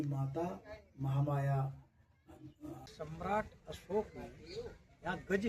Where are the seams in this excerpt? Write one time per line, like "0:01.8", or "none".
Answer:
0:02.9

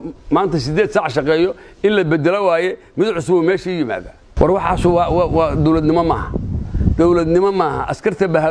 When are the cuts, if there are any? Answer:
0:04.2

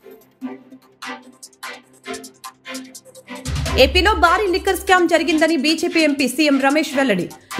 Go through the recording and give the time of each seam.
0:01.2

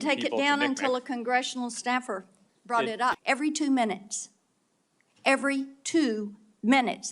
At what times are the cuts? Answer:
0:03.1

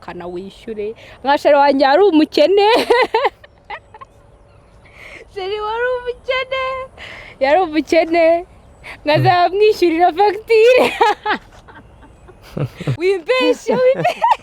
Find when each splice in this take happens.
0:12.8

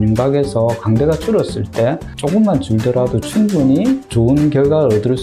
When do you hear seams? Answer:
none

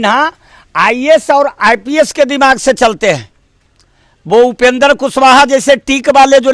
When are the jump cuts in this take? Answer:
none

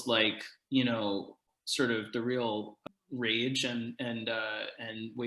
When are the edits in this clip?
0:01.4
0:02.8

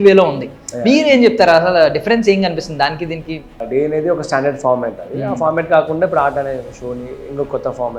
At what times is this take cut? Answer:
0:03.6

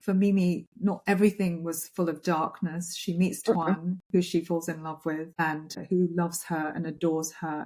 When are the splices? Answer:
0:05.8

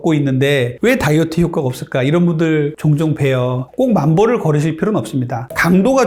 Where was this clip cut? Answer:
none

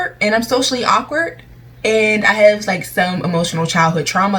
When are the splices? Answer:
none

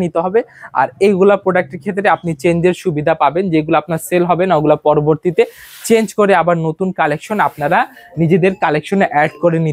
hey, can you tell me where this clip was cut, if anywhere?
none

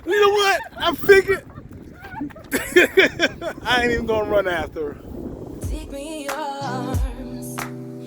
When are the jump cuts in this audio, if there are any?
0:03.5
0:05.7

